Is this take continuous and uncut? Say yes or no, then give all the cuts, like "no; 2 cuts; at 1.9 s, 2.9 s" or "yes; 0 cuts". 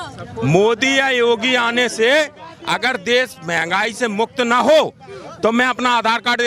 yes; 0 cuts